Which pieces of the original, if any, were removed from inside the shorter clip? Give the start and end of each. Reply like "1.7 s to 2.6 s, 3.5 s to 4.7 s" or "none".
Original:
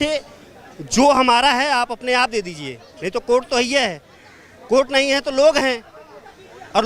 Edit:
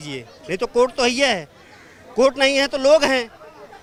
none